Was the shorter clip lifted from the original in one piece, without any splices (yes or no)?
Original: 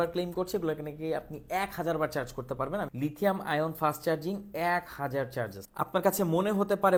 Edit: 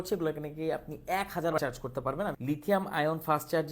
no